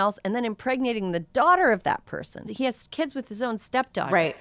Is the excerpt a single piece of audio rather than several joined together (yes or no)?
no